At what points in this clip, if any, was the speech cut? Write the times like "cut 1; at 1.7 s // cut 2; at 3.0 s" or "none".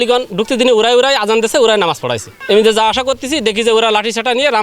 cut 1; at 2.3 s